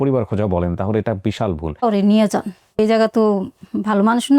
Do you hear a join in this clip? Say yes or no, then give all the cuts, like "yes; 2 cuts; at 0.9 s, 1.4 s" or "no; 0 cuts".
yes; 2 cuts; at 1.8 s, 2.8 s